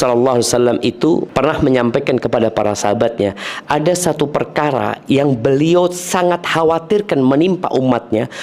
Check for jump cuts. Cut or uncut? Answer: cut